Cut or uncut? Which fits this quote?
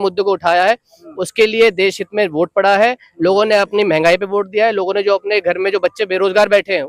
uncut